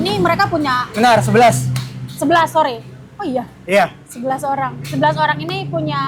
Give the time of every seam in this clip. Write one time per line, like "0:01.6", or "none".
none